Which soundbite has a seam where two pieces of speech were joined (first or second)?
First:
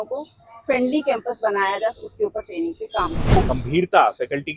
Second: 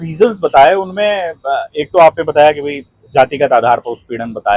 first